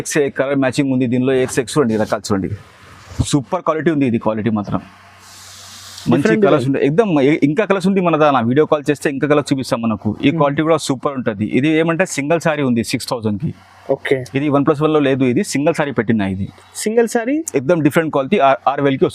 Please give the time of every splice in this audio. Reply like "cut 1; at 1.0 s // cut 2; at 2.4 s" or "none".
none